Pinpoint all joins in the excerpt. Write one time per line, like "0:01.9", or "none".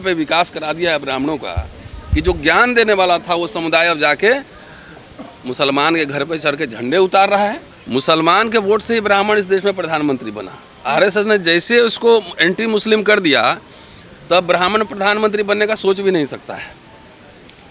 0:07.7